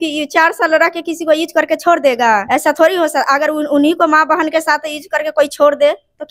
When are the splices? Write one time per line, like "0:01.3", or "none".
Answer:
0:02.4